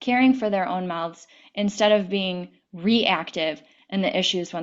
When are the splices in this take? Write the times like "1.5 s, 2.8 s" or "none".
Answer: 3.7 s